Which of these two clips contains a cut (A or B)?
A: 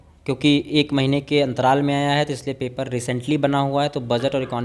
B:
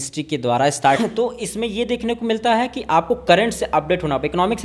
B